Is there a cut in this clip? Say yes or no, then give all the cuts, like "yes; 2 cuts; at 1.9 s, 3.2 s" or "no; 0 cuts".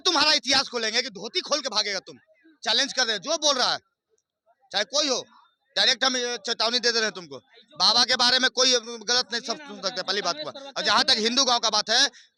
no; 0 cuts